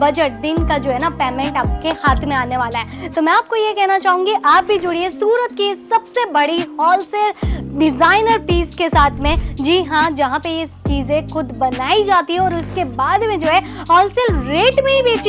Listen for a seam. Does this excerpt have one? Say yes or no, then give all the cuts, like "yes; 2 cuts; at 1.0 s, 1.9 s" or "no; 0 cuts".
no; 0 cuts